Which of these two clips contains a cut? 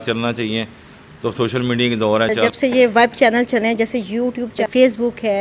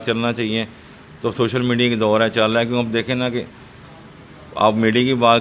first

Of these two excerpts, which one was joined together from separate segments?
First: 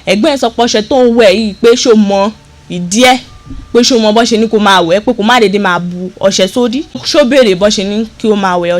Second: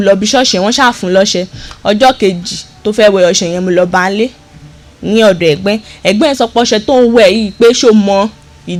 first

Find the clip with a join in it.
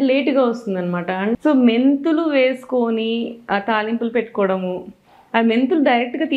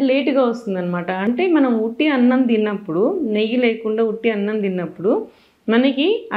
first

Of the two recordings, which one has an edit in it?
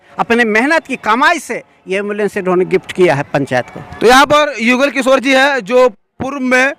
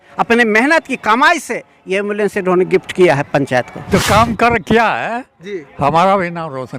second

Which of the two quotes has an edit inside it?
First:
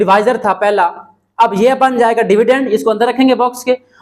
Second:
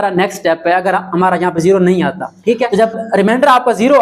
second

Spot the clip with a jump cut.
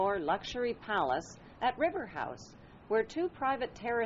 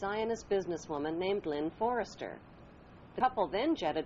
second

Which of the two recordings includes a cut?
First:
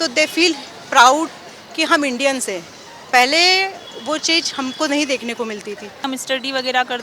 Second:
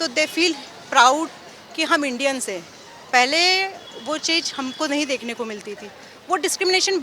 first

